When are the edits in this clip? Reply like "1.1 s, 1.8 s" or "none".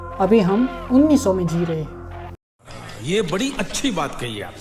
none

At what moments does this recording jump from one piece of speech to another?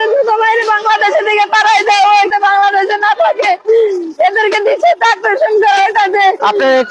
2.3 s

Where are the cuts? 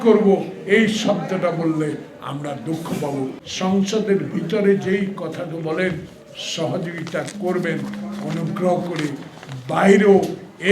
3.4 s

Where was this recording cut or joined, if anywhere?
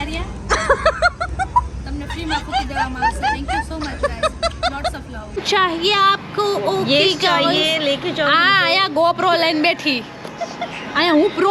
5.4 s

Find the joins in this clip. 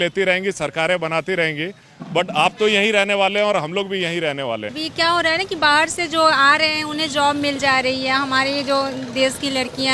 4.8 s

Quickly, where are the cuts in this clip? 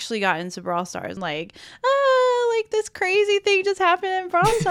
1.2 s

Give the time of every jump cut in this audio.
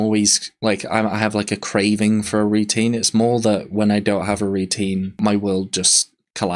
5.1 s

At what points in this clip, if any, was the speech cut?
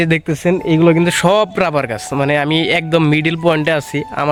none

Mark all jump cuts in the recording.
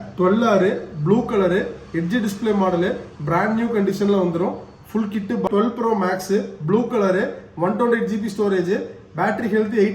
5.5 s

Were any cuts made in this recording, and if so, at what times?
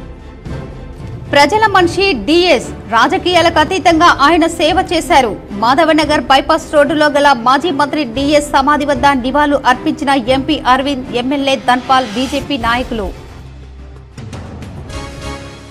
1.2 s

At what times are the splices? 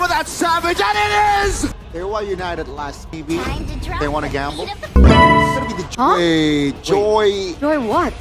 1.8 s, 5.8 s

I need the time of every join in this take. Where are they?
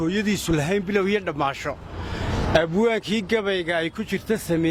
none

